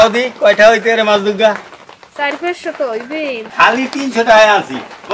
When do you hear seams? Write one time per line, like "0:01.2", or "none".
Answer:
0:03.4